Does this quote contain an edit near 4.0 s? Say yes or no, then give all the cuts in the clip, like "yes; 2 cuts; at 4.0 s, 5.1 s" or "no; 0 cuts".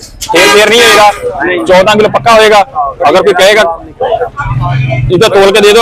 no; 0 cuts